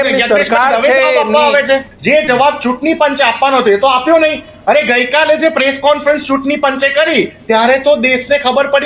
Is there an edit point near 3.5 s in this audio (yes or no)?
no